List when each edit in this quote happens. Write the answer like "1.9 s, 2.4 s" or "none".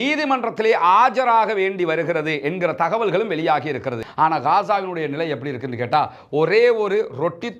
4.0 s